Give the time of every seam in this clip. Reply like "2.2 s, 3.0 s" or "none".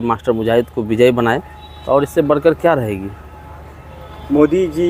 none